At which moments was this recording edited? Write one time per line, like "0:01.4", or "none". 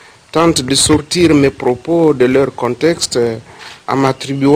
0:02.6